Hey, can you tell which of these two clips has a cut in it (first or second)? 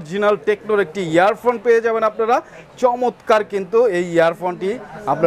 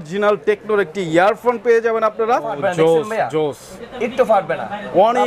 second